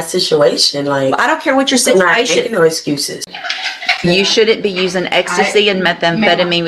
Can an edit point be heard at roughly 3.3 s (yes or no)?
yes